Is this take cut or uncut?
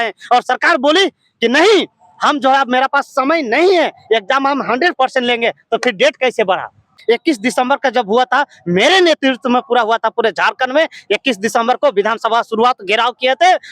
cut